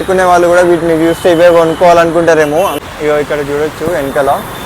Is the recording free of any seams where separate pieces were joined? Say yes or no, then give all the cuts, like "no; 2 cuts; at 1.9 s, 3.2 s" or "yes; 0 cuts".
no; 1 cut; at 2.8 s